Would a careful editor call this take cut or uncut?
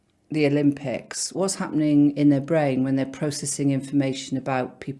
cut